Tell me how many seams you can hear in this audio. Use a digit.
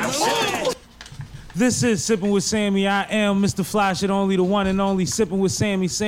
1